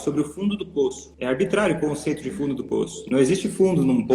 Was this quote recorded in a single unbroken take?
no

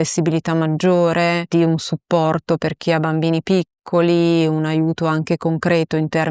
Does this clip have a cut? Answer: no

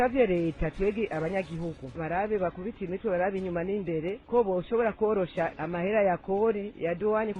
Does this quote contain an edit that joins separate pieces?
yes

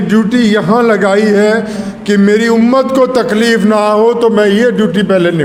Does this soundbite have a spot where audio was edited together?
no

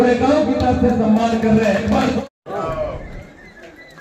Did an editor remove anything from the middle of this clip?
yes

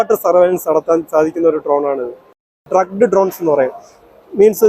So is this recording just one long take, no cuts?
no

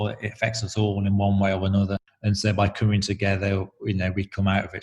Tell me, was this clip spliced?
no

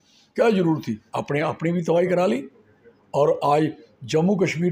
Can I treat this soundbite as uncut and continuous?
yes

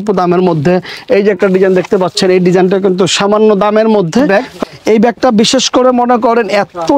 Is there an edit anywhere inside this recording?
yes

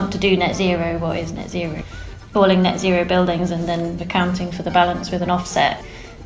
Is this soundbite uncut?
no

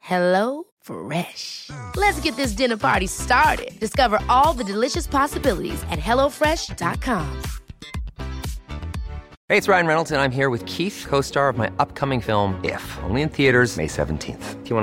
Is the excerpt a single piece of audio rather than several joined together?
no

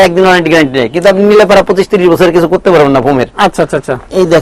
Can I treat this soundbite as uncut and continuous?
yes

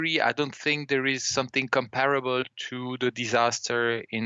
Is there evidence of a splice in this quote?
no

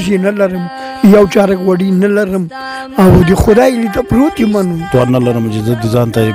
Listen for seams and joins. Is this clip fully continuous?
no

